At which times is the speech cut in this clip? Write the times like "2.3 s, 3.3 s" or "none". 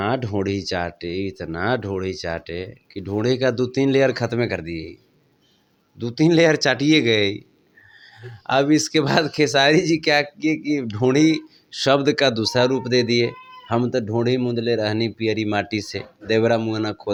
none